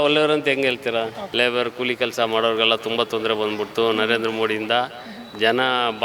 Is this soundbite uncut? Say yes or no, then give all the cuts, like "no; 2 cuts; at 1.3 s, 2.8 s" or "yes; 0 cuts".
no; 1 cut; at 1.2 s